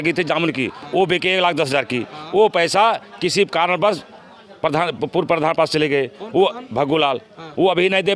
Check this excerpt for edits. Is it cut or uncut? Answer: uncut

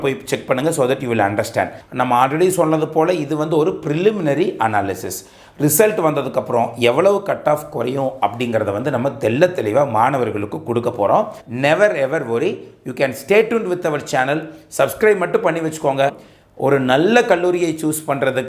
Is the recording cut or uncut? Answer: cut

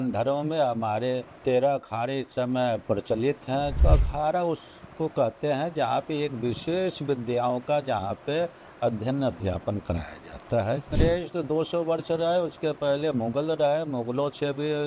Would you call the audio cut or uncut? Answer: cut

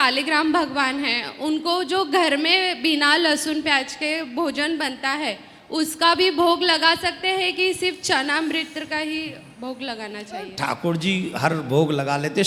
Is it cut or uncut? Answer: uncut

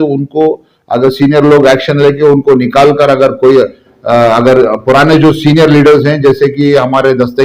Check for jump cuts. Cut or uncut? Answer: uncut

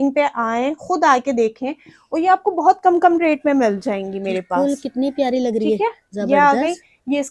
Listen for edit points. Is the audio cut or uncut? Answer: uncut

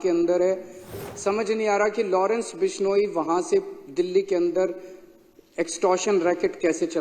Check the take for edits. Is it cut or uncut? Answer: cut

